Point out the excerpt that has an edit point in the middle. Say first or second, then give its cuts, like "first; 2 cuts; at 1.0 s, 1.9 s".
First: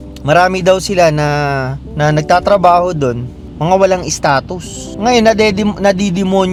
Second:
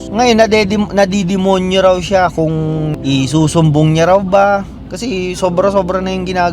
second; 2 cuts; at 2.9 s, 4.8 s